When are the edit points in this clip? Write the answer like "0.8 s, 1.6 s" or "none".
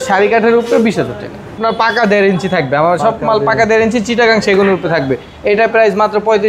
1.6 s